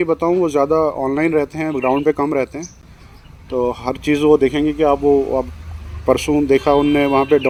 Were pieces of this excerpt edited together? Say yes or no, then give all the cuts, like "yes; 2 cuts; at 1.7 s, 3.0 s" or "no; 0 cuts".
no; 0 cuts